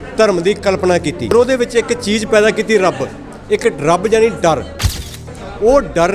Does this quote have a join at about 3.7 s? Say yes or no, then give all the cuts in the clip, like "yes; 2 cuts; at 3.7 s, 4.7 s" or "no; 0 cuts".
no; 2 cuts; at 1.3 s, 5.2 s